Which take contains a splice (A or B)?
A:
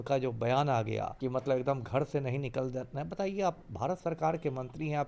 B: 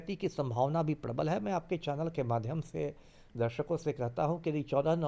A